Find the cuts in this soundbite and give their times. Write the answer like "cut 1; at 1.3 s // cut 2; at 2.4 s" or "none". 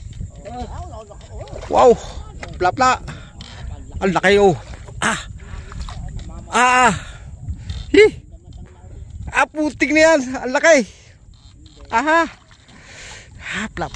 none